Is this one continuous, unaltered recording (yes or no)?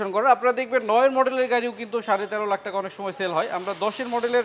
yes